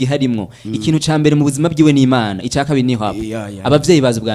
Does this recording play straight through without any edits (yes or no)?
yes